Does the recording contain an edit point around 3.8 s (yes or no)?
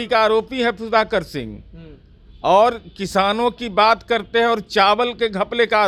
no